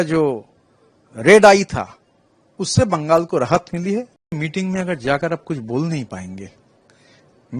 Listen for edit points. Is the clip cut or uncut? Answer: cut